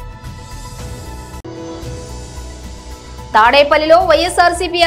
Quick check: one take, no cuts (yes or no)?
no